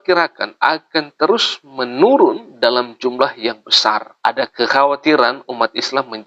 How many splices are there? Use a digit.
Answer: 1